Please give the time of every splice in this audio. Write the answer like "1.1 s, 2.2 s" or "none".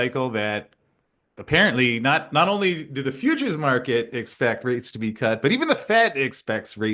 none